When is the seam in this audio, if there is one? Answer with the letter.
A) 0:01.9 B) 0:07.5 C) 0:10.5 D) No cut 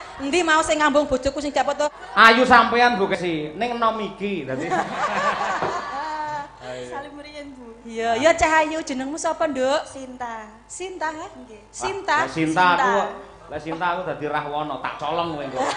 A